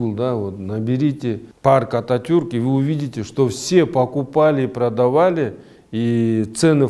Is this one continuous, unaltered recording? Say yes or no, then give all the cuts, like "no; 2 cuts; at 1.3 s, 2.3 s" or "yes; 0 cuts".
no; 1 cut; at 1.5 s